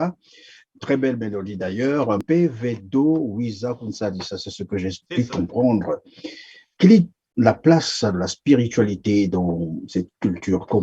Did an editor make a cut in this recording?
yes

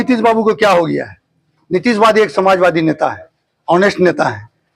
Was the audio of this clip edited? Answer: no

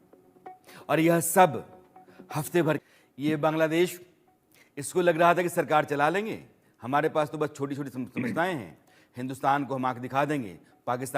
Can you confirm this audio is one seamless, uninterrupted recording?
no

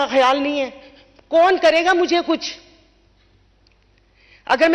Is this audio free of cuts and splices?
yes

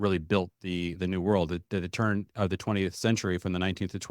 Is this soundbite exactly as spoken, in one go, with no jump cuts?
no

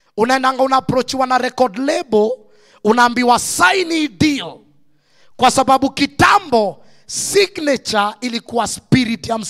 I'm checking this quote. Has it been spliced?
no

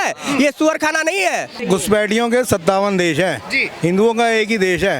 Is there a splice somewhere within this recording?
yes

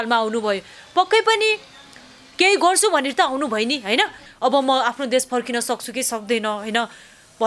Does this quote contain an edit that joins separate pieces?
yes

